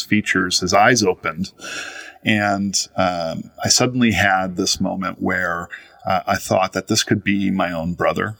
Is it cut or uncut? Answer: uncut